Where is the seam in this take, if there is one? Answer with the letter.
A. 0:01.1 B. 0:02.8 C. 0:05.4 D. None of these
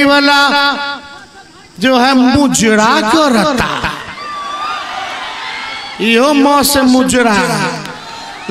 D